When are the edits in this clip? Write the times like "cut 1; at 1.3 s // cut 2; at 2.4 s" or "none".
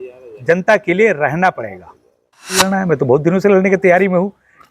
cut 1; at 2.6 s